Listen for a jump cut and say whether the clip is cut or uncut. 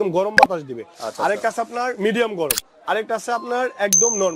uncut